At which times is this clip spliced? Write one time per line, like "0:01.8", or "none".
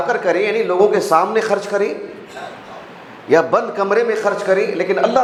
none